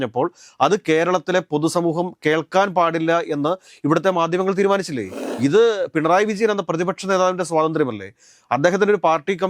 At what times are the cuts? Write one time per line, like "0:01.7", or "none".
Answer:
0:05.2